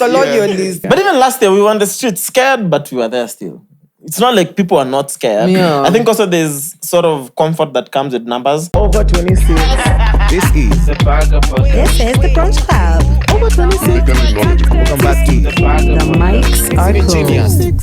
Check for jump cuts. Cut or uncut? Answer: cut